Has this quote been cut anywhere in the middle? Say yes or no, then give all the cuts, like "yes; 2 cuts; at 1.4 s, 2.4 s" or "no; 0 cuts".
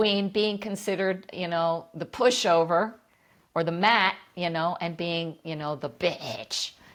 no; 0 cuts